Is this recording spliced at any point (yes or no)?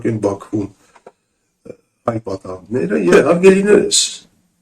yes